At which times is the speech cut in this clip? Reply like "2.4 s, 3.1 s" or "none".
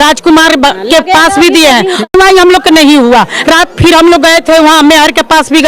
2.1 s

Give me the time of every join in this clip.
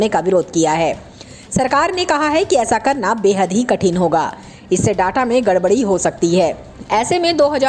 6.7 s

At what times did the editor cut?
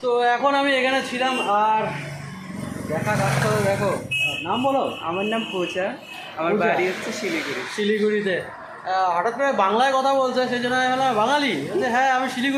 none

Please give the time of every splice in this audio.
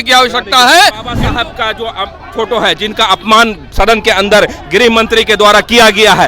1.1 s

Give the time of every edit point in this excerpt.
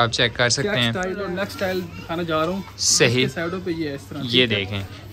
1.2 s

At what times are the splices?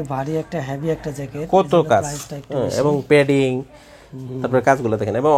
none

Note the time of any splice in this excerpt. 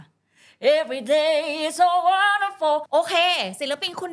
2.8 s

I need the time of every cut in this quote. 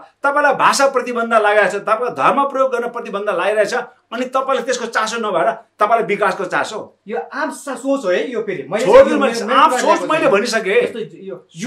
none

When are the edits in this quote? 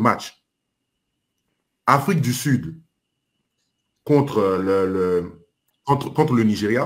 5.8 s

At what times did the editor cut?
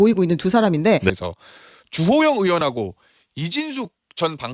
1.1 s

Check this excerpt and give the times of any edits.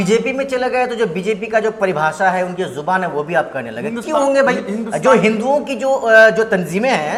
none

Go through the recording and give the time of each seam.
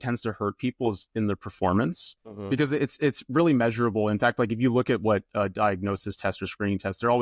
none

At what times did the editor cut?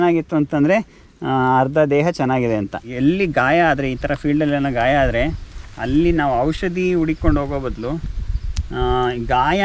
2.9 s

